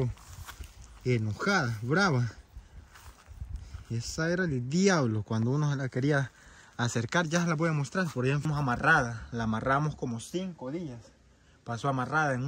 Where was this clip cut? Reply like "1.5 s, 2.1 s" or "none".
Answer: 8.4 s